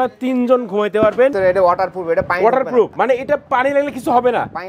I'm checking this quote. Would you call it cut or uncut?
cut